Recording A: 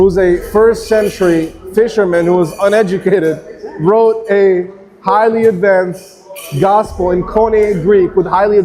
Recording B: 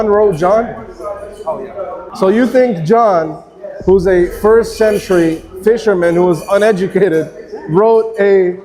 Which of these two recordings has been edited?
B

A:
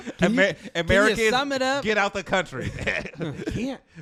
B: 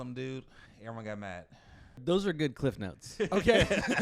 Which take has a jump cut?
B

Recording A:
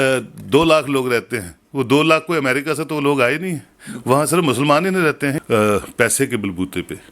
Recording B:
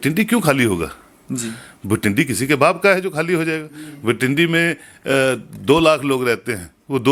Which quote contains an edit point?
A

